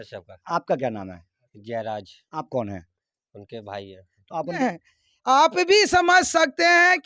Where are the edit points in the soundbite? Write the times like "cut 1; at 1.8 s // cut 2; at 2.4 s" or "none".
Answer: cut 1; at 4.6 s